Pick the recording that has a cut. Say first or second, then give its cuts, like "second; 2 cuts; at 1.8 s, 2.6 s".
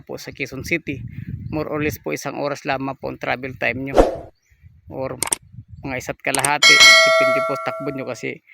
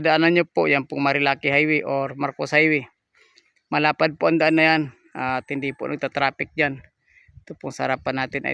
first; 2 cuts; at 6.8 s, 7.6 s